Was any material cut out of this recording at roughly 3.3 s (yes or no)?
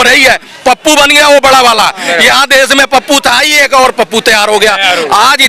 no